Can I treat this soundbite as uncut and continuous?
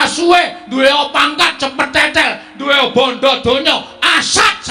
yes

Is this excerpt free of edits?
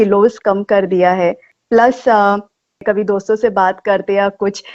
no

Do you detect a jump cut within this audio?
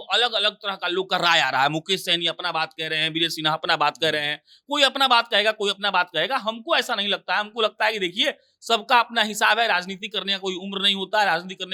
no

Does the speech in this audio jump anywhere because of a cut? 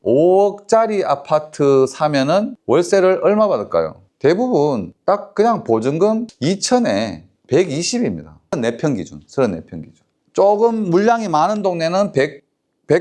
no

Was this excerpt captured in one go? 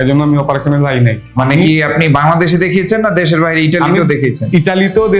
yes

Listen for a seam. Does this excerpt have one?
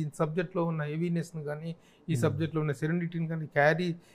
no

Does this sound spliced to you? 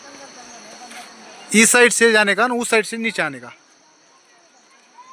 no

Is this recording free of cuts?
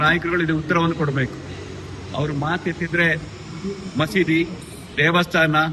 yes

